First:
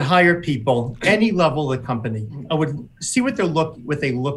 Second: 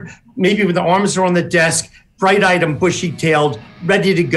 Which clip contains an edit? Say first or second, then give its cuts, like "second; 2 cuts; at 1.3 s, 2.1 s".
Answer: first; 2 cuts; at 0.9 s, 2.4 s